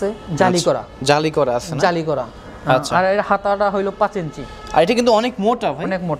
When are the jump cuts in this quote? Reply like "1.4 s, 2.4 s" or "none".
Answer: none